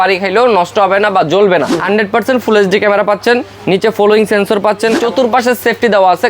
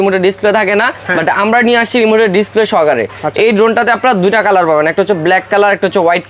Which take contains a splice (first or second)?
first